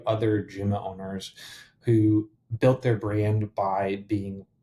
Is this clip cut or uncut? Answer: uncut